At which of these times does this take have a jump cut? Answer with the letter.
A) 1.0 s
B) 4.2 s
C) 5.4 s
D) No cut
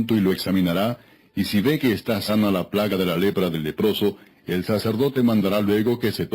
B